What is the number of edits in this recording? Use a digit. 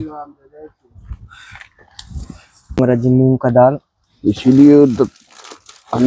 1